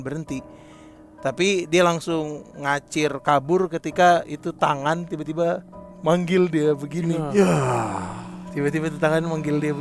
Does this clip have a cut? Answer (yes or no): no